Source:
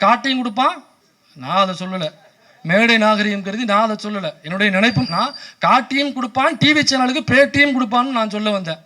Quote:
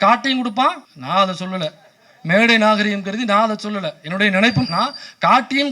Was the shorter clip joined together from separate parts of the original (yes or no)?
yes